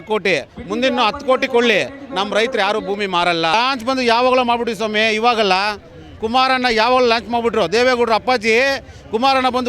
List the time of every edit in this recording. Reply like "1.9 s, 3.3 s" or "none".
3.5 s